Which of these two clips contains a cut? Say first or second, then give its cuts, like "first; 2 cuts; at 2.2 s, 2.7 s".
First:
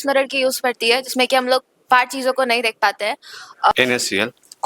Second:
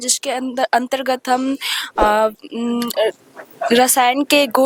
first; 1 cut; at 3.7 s